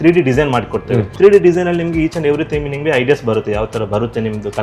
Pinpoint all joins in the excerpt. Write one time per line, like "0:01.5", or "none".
0:01.1

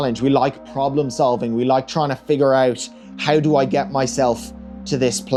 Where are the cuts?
none

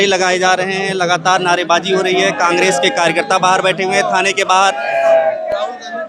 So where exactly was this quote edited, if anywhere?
none

